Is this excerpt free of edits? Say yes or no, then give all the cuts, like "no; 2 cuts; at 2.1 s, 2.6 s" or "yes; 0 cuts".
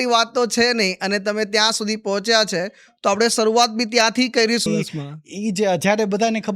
no; 1 cut; at 4.7 s